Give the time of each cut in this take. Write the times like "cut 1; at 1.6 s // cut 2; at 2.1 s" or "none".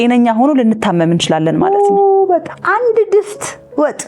cut 1; at 2.6 s